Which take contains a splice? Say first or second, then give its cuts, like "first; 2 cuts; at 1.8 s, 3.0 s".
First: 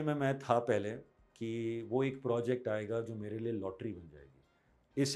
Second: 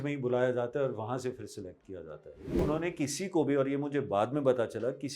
second; 1 cut; at 2.6 s